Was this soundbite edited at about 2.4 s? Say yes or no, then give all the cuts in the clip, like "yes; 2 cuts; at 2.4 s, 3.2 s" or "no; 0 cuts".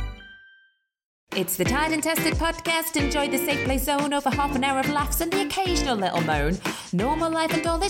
no; 1 cut; at 1.1 s